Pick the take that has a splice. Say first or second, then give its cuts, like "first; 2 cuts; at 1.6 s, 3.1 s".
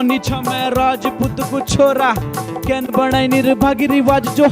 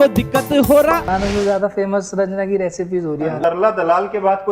second; 2 cuts; at 1.1 s, 3.3 s